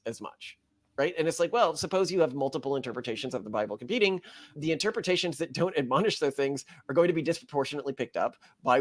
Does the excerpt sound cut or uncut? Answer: uncut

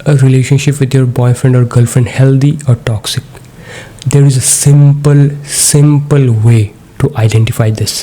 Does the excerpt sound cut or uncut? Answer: uncut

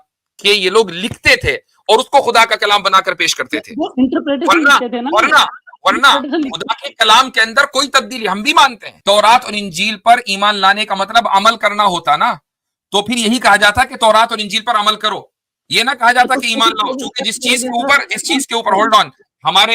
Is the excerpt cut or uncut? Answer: cut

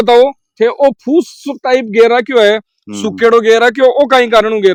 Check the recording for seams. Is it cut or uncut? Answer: uncut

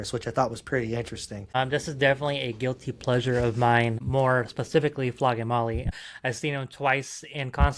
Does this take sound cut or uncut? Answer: cut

